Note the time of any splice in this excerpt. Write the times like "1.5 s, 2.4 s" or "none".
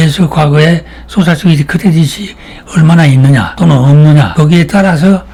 none